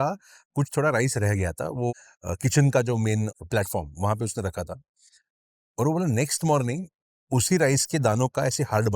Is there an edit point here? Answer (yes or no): yes